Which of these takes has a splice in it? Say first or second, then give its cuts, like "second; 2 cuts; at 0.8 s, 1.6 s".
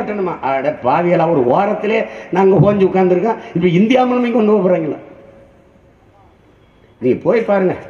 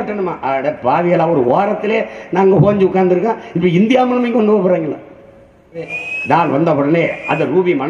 second; 1 cut; at 6.0 s